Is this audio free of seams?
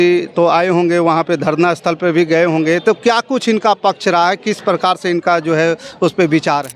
yes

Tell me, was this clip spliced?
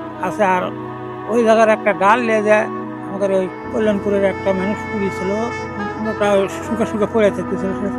yes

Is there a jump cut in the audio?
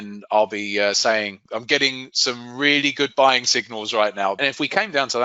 yes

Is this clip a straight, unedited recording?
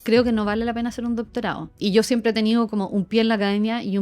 no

